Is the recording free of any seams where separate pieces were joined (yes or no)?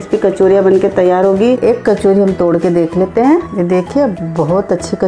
no